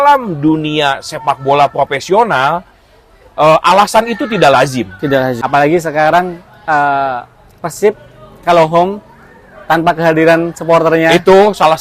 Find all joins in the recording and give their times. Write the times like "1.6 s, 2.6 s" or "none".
5.4 s